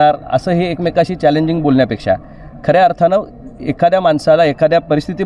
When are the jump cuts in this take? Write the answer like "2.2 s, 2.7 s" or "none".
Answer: none

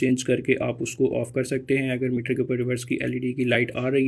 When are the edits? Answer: none

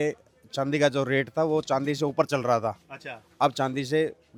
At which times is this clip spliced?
none

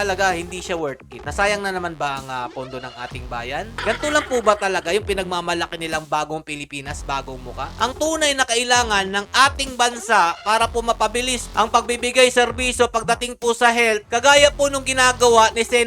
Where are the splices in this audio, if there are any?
3.8 s, 7.7 s

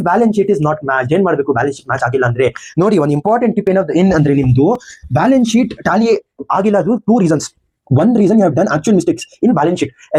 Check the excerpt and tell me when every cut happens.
none

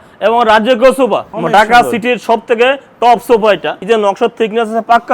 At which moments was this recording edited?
1.3 s, 3.7 s

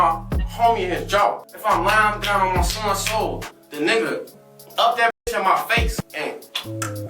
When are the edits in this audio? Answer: 1.5 s, 6.0 s

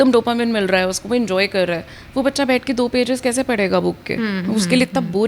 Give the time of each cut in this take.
none

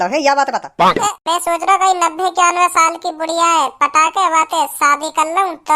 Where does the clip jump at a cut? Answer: 1.2 s

